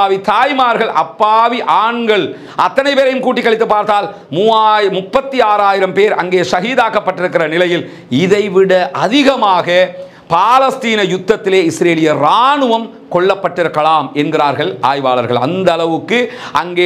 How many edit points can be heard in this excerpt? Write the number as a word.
zero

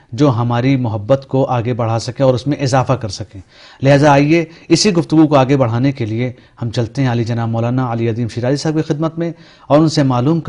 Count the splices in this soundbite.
one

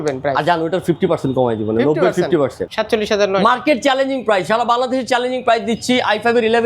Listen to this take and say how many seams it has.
one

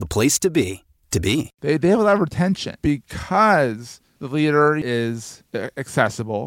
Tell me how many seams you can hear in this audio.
three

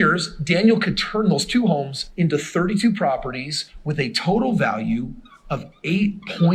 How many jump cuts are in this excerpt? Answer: zero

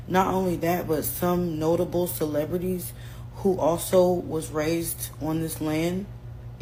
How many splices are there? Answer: zero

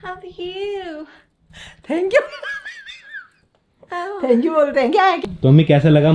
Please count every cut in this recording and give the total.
one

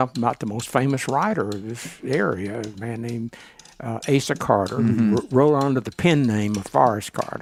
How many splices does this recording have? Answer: zero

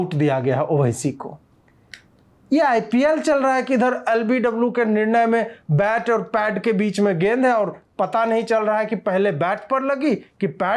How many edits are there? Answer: zero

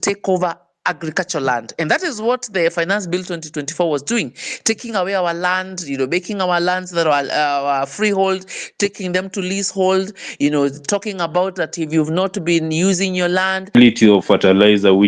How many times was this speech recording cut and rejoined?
one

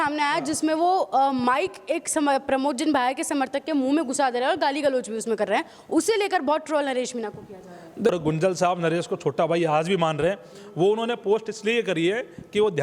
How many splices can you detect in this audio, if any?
one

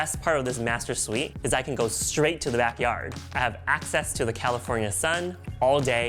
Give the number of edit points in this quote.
two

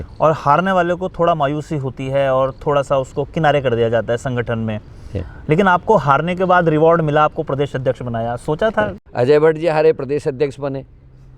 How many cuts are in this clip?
one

